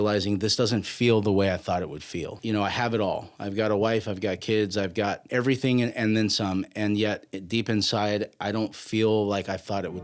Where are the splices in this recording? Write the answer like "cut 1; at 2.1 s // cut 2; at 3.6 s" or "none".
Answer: cut 1; at 2.4 s